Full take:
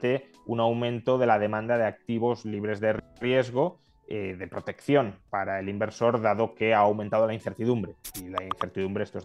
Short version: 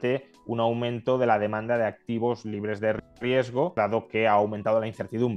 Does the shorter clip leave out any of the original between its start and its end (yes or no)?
yes